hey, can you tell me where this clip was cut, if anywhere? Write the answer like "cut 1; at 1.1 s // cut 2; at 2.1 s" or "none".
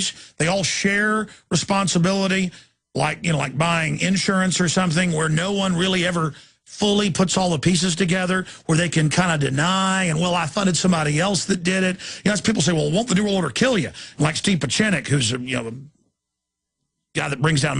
cut 1; at 15.3 s